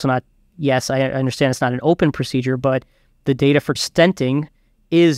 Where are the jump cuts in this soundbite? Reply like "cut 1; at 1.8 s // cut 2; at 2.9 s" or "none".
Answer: cut 1; at 3.8 s